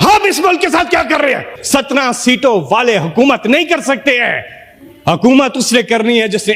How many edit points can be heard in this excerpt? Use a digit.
1